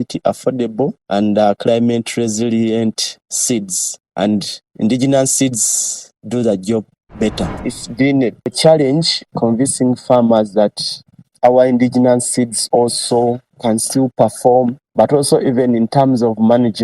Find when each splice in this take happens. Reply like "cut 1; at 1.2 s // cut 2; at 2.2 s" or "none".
cut 1; at 7.5 s // cut 2; at 9.3 s